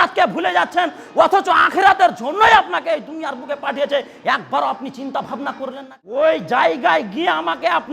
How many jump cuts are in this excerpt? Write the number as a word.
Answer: one